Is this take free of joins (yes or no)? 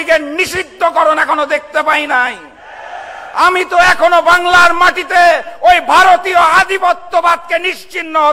yes